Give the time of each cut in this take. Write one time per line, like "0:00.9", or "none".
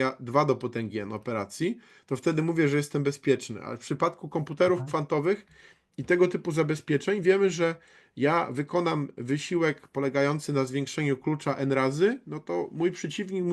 none